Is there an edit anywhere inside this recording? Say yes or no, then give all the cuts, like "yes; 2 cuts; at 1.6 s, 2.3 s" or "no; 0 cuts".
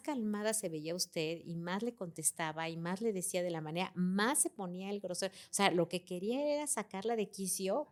no; 0 cuts